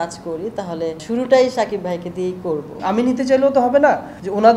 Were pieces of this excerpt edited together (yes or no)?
yes